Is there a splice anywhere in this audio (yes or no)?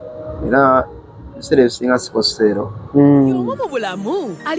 yes